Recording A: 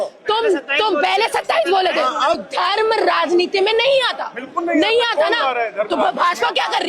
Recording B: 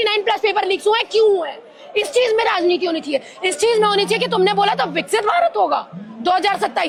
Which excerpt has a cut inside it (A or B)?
A